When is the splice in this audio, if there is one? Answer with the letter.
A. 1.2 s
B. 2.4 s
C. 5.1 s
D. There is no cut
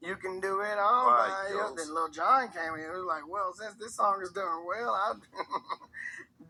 D